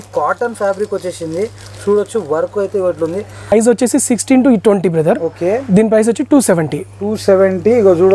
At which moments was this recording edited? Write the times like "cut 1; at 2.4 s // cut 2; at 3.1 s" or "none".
cut 1; at 3.5 s